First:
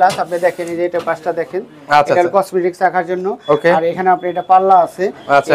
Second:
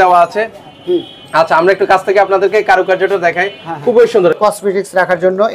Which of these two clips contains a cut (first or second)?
second